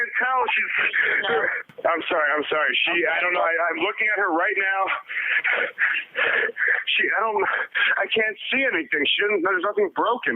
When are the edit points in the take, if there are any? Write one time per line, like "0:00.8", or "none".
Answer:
0:01.6